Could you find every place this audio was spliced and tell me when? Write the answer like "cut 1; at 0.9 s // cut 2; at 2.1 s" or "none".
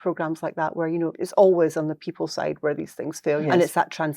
cut 1; at 1.2 s // cut 2; at 3.4 s